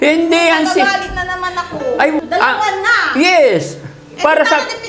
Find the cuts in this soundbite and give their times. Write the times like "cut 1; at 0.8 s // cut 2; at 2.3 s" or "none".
cut 1; at 2.2 s